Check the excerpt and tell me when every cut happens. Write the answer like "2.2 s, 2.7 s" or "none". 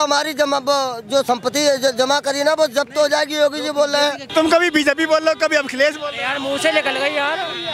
4.3 s